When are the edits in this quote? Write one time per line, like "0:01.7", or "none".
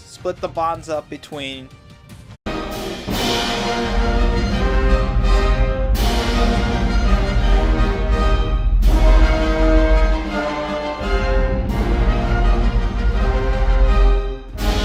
none